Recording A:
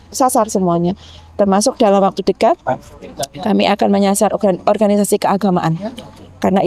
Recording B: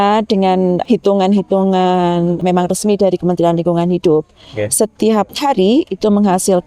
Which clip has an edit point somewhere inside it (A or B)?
B